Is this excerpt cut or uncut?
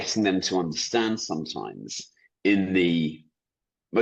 uncut